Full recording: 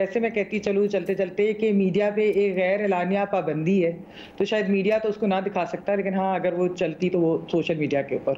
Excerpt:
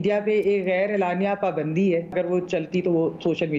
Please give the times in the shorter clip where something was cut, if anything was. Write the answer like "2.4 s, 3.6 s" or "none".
2.1 s